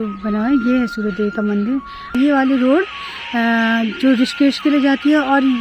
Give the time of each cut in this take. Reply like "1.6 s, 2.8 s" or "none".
2.2 s